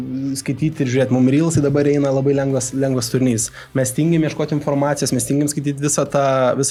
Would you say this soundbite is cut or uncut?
uncut